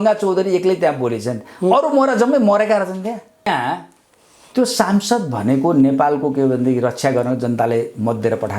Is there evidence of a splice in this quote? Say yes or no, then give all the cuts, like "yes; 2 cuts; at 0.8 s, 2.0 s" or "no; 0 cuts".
yes; 1 cut; at 3.5 s